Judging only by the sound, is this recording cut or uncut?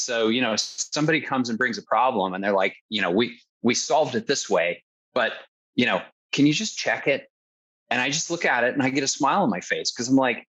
uncut